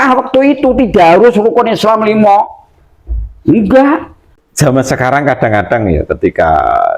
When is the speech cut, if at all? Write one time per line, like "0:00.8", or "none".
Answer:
0:04.2